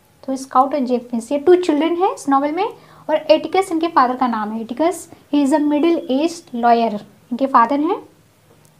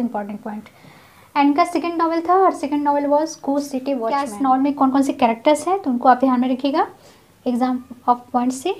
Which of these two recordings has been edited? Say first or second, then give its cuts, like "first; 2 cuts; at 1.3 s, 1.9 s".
second; 1 cut; at 4.2 s